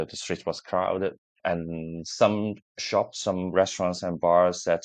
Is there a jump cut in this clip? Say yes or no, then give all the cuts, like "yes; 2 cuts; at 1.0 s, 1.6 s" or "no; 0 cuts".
no; 0 cuts